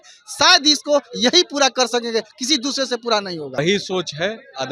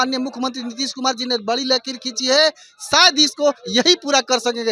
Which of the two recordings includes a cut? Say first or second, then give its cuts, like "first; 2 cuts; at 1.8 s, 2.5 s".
first; 1 cut; at 3.6 s